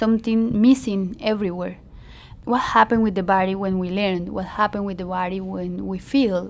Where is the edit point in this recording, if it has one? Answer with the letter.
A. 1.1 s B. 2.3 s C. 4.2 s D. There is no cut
B